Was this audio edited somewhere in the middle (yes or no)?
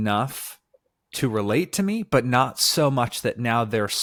no